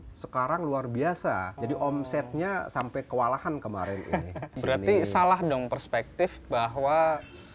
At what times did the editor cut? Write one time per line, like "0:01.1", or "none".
0:01.5
0:04.5